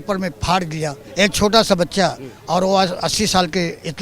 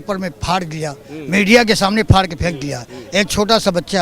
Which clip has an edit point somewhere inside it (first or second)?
first